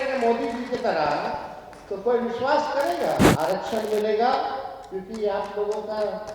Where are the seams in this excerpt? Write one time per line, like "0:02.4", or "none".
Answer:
0:03.3